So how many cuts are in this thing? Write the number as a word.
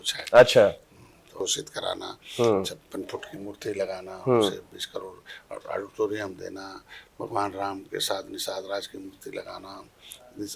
one